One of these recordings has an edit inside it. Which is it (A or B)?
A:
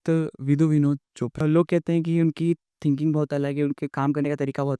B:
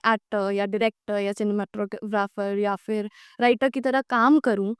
A